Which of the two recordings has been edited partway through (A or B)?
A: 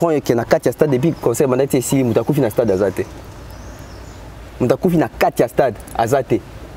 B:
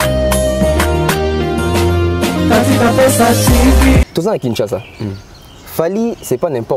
B